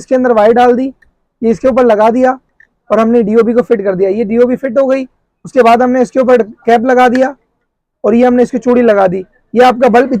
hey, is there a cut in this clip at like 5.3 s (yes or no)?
no